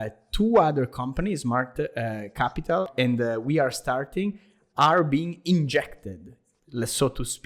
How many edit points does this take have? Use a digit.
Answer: 1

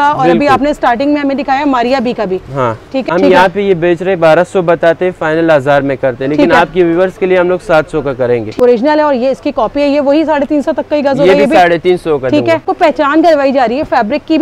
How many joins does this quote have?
3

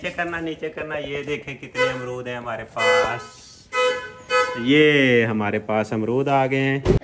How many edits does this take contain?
0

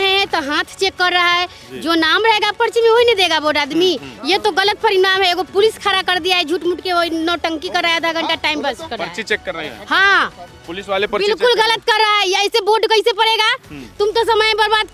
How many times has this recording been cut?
0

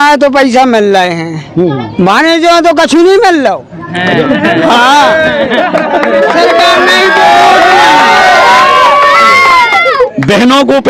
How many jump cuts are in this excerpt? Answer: 0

